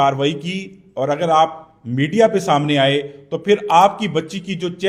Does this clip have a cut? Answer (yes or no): no